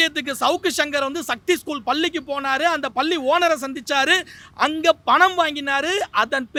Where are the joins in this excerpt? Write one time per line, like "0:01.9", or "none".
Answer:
none